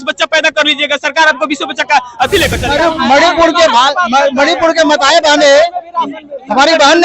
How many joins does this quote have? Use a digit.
1